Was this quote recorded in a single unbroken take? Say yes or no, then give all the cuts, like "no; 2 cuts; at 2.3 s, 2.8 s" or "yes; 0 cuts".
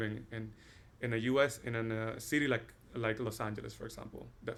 yes; 0 cuts